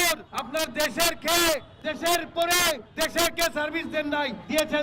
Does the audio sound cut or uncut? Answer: uncut